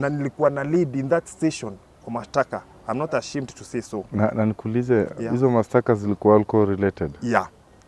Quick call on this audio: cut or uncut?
uncut